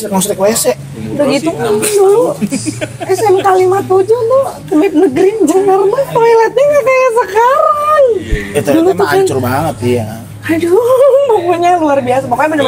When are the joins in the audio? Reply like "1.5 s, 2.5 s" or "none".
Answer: none